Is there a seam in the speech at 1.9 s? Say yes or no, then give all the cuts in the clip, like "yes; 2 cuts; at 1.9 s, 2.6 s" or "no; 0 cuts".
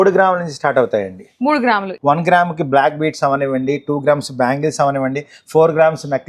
yes; 1 cut; at 1.9 s